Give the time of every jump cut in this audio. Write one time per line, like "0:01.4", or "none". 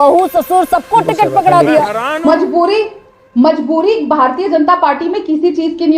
0:02.2